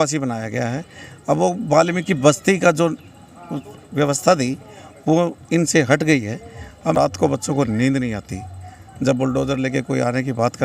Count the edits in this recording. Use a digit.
1